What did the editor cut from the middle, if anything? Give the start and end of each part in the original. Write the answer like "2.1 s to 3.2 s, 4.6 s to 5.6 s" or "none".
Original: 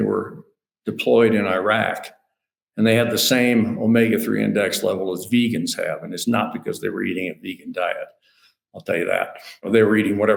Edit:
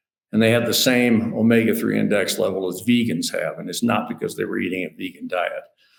none